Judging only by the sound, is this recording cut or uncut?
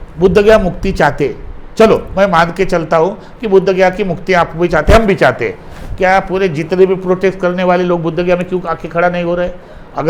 uncut